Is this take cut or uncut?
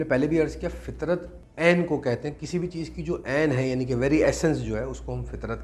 cut